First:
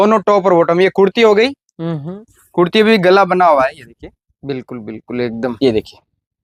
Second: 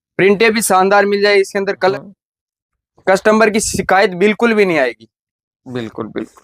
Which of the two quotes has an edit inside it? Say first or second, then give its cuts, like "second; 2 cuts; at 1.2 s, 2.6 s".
second; 1 cut; at 1.9 s